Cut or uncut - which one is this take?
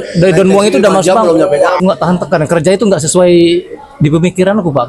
cut